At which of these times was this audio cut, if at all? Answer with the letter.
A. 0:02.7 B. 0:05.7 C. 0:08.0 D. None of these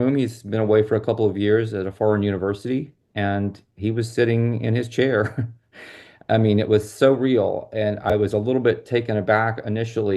C